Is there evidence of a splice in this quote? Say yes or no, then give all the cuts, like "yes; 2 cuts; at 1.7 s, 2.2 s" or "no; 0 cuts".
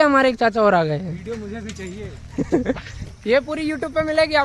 no; 0 cuts